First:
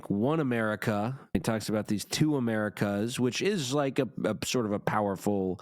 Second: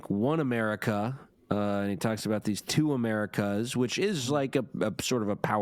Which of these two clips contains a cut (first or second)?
first